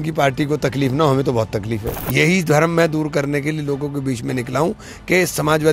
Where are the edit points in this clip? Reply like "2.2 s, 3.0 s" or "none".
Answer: 2.0 s